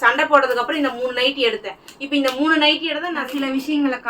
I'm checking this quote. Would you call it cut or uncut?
cut